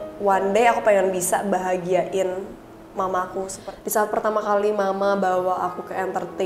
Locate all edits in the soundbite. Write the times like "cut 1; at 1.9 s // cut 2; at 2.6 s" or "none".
cut 1; at 3.6 s